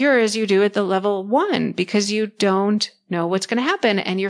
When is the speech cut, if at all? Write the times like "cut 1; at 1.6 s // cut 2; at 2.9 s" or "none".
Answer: none